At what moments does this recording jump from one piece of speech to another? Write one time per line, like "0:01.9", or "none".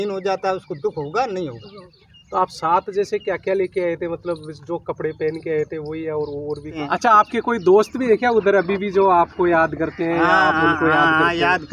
0:06.8